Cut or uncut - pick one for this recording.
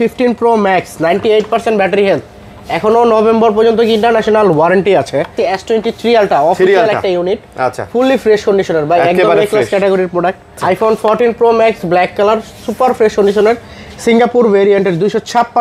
cut